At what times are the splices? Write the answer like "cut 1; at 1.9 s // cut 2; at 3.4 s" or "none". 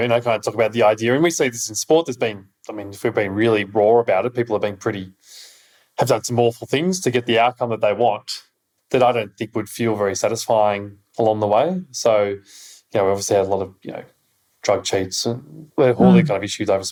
none